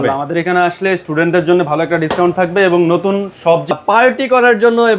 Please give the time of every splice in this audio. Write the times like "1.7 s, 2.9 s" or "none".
3.7 s